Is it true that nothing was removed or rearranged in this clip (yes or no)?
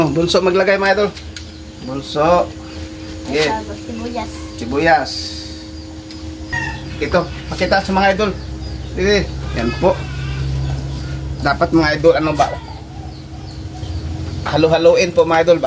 no